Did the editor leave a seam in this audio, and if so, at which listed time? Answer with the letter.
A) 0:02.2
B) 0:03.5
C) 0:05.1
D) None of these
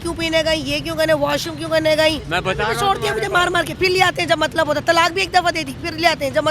A